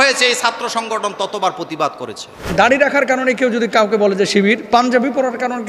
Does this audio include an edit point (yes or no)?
yes